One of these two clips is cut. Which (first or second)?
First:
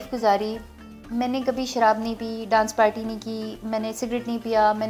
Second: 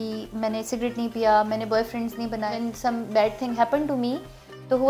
second